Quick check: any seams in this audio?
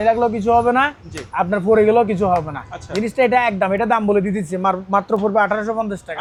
no; 0 cuts

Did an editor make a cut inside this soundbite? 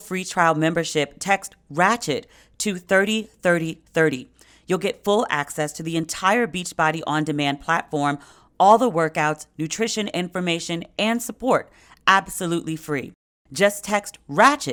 no; 0 cuts

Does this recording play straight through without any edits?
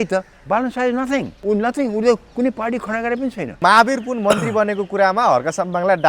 no; 2 cuts; at 1.3 s, 3.6 s

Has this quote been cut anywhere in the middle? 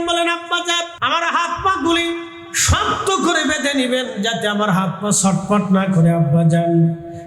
yes; 1 cut; at 0.9 s

